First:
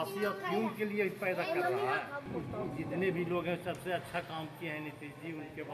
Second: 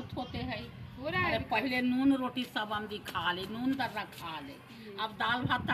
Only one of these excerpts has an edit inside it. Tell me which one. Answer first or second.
first